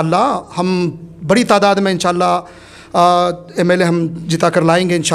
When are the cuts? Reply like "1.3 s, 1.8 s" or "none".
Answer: none

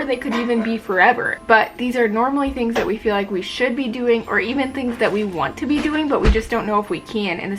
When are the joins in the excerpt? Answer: 1.3 s

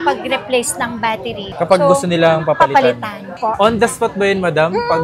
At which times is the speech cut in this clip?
1.4 s

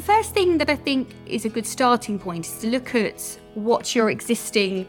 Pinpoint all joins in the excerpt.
1.2 s

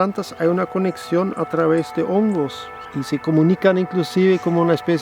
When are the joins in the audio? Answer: 2.8 s

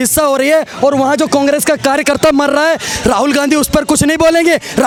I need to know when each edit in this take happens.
none

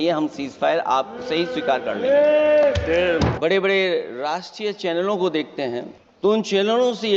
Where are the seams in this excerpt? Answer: 3.3 s, 6.0 s

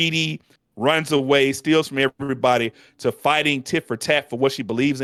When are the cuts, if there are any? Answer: none

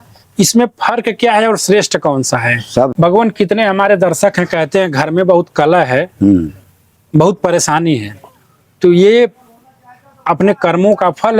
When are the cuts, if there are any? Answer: 2.9 s

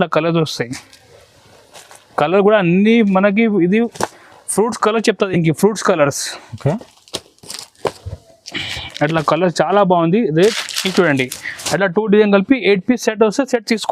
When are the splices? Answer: 10.6 s

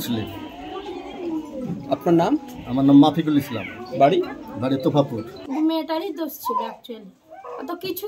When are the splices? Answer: 5.3 s

